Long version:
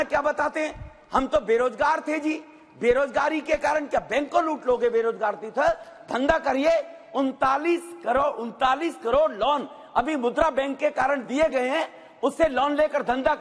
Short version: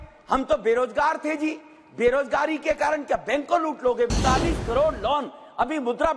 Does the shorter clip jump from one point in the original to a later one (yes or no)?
yes